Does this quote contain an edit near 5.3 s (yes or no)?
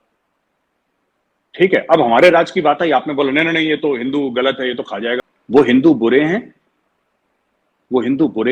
yes